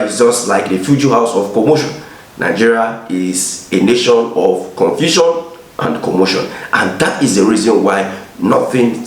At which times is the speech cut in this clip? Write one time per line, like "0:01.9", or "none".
none